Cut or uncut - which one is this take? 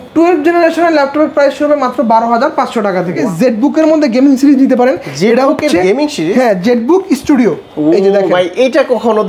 cut